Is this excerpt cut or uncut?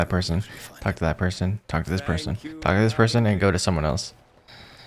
uncut